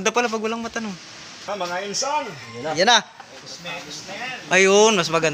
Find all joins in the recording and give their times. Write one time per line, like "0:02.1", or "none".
0:01.4